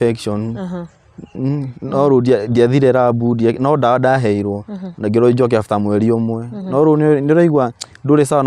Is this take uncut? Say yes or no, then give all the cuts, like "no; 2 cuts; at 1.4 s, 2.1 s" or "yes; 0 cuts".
yes; 0 cuts